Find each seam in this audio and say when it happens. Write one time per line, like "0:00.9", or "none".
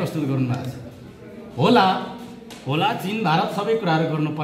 none